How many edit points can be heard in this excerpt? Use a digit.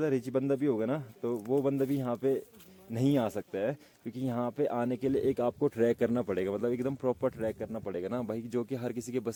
0